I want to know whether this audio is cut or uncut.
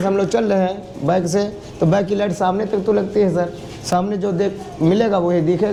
uncut